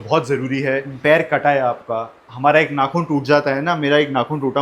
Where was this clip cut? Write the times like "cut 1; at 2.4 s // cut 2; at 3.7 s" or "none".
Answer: cut 1; at 0.9 s